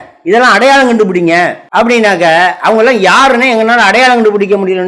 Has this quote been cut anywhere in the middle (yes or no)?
yes